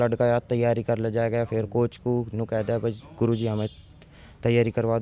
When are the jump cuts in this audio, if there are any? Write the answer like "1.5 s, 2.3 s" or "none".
none